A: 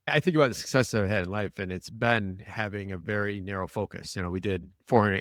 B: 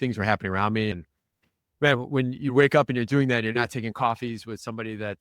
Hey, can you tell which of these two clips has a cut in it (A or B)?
B